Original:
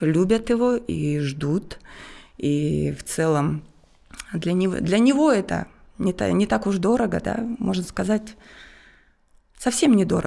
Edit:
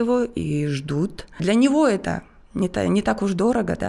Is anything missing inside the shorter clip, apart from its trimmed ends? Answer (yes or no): yes